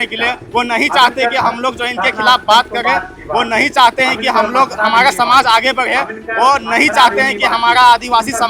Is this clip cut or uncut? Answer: uncut